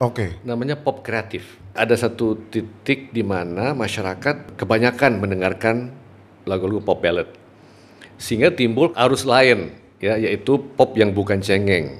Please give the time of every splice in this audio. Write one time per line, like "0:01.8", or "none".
0:01.7
0:04.5
0:08.9

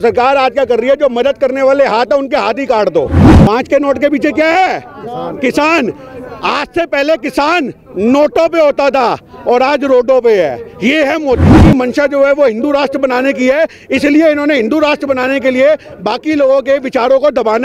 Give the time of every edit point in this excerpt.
0:03.2
0:11.5

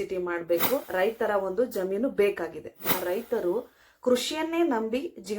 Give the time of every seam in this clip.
0:00.9
0:02.8

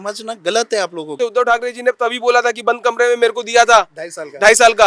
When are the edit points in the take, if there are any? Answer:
0:01.2

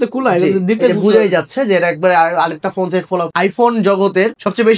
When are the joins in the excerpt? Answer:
0:03.3

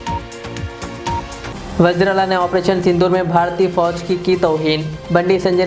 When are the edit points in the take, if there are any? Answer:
0:01.1

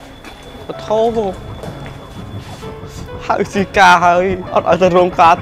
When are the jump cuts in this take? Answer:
none

